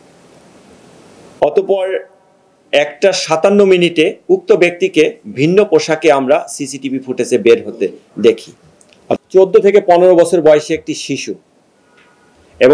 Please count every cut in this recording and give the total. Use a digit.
1